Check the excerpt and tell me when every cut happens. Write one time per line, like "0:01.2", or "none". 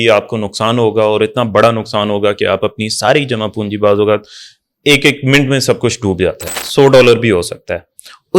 0:06.5